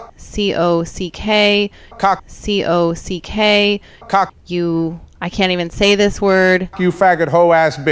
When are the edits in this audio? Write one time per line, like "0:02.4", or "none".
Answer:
none